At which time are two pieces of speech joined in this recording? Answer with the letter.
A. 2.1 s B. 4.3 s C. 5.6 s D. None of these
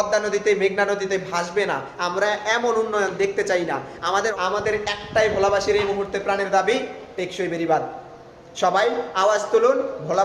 B